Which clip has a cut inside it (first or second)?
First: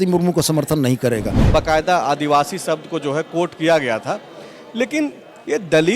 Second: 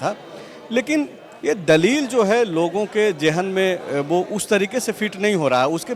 first